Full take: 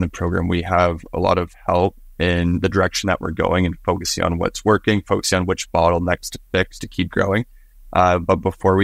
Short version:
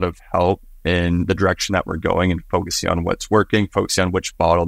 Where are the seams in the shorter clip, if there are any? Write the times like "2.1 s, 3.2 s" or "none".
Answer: none